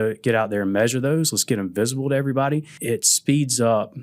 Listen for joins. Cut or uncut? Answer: cut